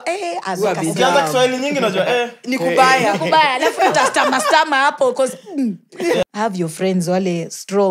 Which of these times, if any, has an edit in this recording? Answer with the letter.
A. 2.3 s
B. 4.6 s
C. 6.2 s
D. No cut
C